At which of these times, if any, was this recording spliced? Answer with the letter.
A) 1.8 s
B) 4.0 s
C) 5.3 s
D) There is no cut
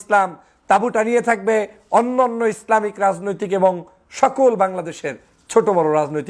D